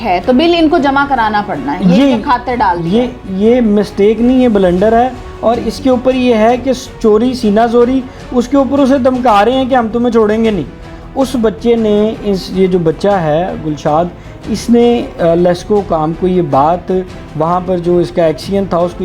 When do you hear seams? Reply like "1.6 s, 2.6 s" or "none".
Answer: none